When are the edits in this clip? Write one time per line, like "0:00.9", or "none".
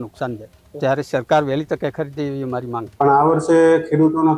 0:02.8